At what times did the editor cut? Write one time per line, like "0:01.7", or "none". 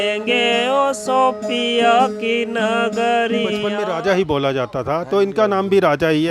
0:03.8